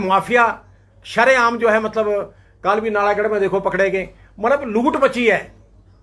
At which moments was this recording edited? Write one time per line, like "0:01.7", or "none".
none

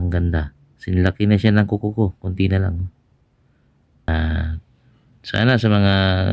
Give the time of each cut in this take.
0:04.1

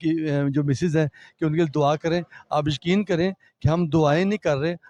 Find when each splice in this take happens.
none

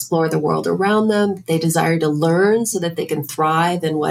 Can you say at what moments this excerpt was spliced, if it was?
none

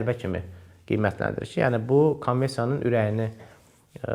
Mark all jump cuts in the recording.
none

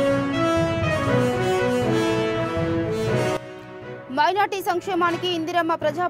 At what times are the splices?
0:03.4

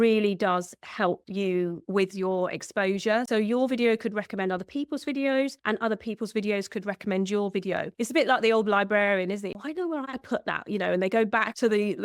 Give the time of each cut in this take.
0:03.3
0:07.9
0:09.5

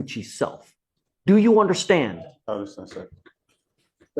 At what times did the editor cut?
0:03.1

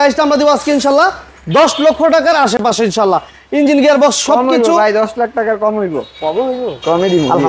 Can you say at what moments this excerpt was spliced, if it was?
none

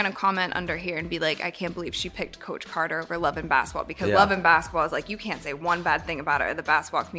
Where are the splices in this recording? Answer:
none

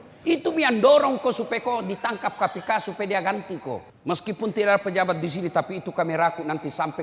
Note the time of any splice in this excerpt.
0:03.9

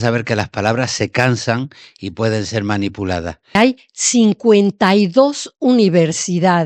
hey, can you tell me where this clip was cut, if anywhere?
0:03.6

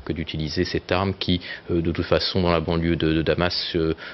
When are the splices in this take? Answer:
0:01.5

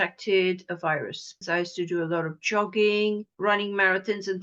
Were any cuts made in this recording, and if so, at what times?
0:01.4
0:03.3

